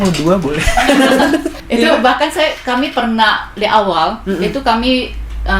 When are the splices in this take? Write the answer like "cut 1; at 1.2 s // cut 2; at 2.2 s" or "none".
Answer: cut 1; at 1.6 s